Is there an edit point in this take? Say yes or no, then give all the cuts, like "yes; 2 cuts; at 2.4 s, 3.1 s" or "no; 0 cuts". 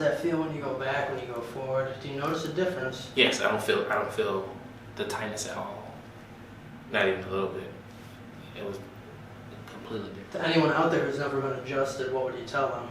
yes; 1 cut; at 10.2 s